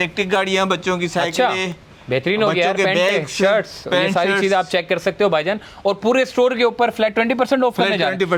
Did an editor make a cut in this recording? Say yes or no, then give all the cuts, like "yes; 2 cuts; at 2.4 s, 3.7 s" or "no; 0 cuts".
no; 0 cuts